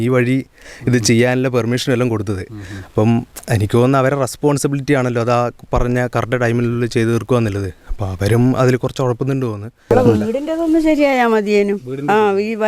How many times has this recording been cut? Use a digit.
1